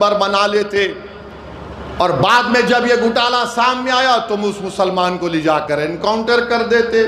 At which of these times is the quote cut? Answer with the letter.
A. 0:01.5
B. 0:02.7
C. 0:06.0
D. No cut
D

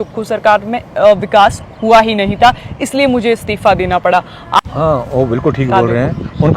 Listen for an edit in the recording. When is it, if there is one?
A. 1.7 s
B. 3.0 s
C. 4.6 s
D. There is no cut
C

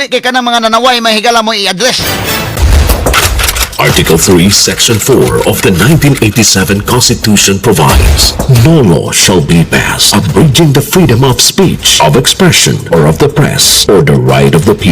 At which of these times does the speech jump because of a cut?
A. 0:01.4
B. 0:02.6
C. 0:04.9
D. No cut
B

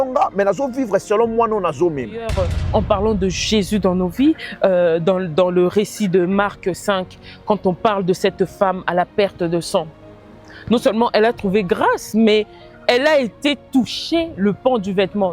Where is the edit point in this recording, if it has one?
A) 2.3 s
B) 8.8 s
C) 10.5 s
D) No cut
A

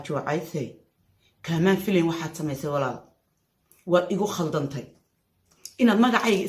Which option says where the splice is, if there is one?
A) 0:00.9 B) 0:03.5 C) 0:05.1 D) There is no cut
D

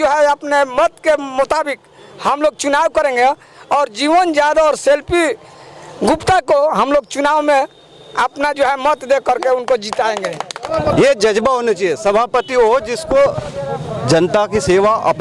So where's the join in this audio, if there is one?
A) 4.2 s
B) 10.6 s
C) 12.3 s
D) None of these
B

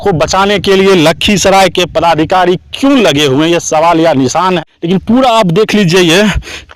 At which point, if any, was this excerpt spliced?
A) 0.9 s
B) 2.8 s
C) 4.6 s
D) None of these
C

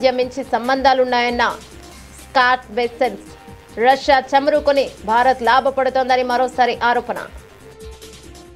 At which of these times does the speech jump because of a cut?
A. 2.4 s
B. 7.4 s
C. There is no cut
B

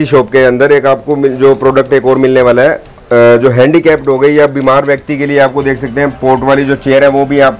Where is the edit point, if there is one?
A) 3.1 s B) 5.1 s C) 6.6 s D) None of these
D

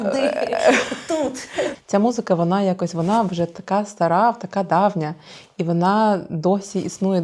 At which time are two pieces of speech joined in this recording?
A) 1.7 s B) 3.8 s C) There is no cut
A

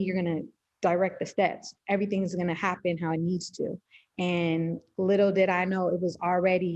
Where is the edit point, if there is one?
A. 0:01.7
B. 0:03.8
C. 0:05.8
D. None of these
D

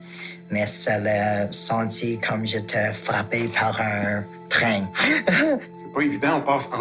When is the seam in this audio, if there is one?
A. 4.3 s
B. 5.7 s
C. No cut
B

